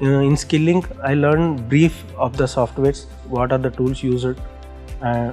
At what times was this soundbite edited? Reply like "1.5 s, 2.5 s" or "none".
0.9 s